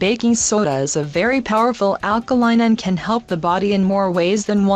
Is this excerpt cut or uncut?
uncut